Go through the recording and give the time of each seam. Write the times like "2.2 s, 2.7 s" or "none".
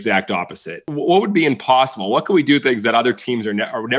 0.9 s